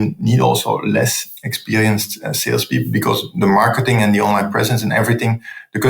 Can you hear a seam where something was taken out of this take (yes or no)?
yes